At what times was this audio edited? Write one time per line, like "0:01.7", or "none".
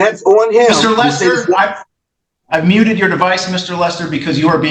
none